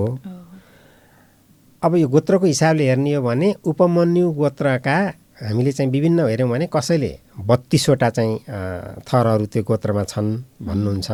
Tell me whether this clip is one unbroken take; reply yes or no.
yes